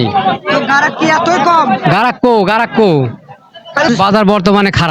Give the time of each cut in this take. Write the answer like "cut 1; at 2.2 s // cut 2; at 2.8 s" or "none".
cut 1; at 3.9 s